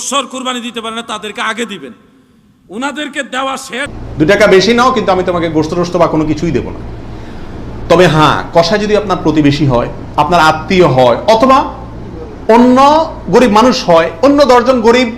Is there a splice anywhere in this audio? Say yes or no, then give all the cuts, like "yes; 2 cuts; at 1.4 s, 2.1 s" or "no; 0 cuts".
yes; 1 cut; at 4.0 s